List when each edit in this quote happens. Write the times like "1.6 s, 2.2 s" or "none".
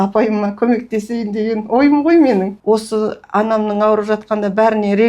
2.6 s